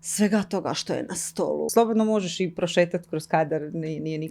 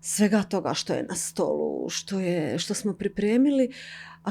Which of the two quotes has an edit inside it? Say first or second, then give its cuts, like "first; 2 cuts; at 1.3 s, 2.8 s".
first; 1 cut; at 1.7 s